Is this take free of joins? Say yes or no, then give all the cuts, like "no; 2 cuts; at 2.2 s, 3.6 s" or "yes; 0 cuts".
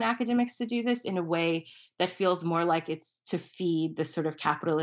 yes; 0 cuts